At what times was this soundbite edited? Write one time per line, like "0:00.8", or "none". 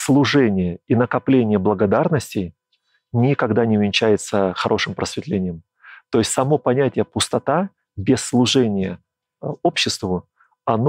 none